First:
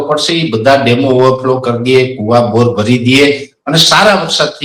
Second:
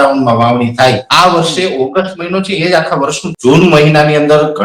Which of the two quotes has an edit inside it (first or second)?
second